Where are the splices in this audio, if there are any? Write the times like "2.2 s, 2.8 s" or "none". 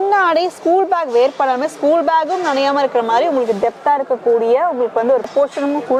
none